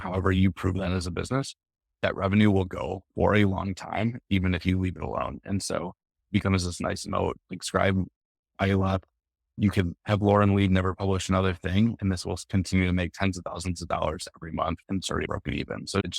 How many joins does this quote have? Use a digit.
1